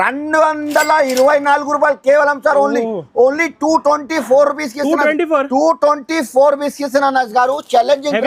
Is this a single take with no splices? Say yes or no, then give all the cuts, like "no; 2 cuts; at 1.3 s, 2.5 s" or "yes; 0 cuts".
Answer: yes; 0 cuts